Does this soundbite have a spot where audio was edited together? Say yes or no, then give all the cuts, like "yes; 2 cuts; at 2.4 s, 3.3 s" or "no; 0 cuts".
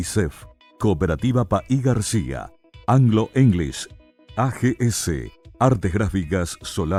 no; 0 cuts